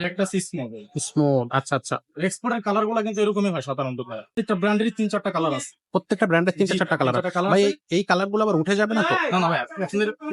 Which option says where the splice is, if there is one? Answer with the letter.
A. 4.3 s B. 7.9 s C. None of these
A